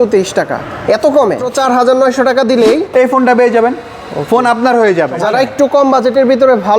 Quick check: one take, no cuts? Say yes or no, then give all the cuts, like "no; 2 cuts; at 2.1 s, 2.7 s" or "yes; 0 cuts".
no; 3 cuts; at 1.5 s, 2.9 s, 5.1 s